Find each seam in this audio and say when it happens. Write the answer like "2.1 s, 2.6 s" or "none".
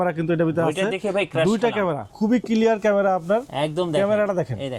2.1 s